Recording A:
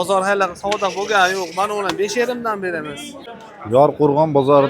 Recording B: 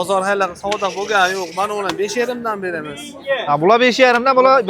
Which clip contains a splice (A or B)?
A